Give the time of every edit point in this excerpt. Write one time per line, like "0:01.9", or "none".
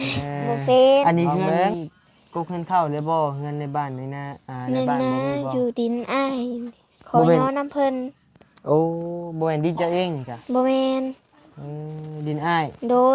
0:01.7